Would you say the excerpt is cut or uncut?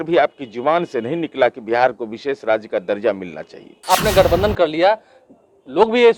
cut